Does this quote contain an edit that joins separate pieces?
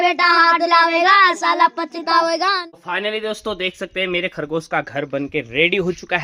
yes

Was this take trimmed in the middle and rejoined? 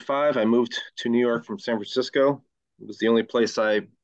no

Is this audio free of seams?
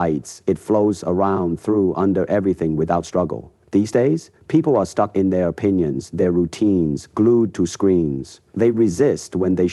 yes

